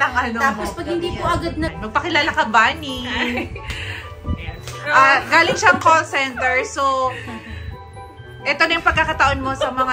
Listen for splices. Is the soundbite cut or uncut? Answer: cut